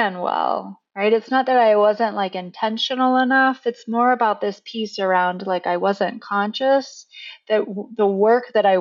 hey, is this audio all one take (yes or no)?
yes